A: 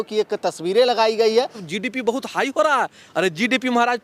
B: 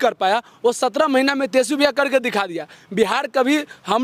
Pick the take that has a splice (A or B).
A